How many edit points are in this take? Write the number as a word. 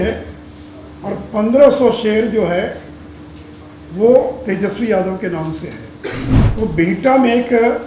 one